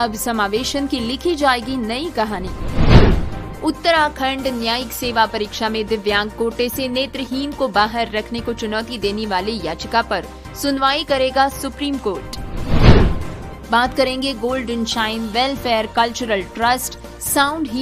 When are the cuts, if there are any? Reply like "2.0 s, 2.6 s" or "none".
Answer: none